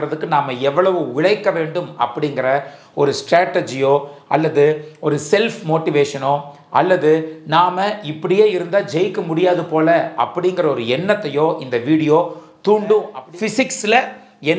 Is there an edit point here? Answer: yes; 1 cut; at 13.2 s

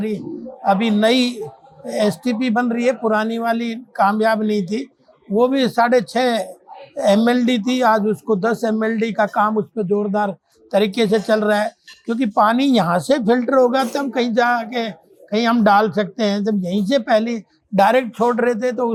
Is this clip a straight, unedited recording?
yes; 0 cuts

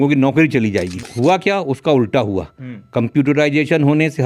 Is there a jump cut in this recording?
yes; 1 cut; at 1.1 s

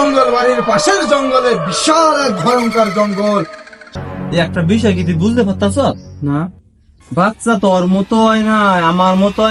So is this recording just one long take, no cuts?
no; 1 cut; at 3.8 s

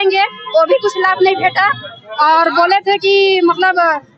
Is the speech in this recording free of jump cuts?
yes; 0 cuts

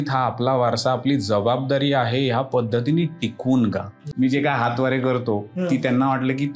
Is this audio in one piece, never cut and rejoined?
no; 1 cut; at 4.0 s

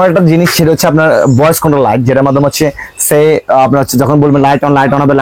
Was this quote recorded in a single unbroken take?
yes; 0 cuts

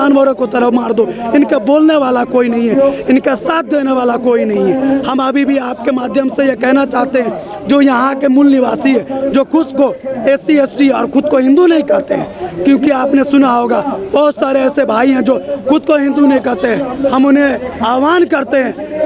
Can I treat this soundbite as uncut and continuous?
yes; 0 cuts

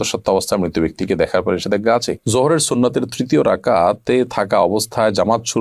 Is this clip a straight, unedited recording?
no; 1 cut; at 2.2 s

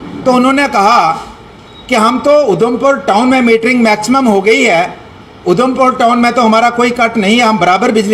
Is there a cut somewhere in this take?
no; 0 cuts

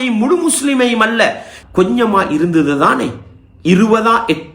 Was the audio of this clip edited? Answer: yes; 1 cut; at 1.5 s

